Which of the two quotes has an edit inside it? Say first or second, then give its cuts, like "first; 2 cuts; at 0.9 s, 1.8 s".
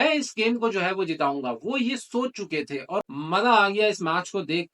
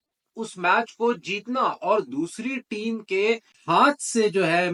first; 1 cut; at 3.1 s